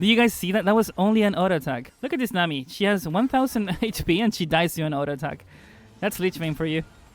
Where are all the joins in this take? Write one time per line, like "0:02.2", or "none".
0:01.9